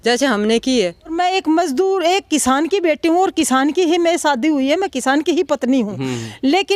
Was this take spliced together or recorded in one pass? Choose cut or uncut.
cut